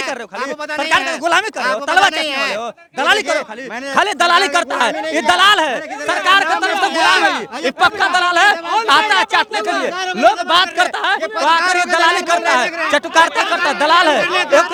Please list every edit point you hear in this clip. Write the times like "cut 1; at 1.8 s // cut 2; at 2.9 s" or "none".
none